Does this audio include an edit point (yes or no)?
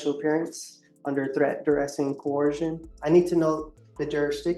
yes